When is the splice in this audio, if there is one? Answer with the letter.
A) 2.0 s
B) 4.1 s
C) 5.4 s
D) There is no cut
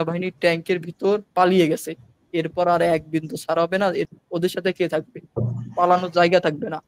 B